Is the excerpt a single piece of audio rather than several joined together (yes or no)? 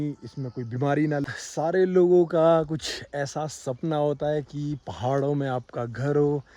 no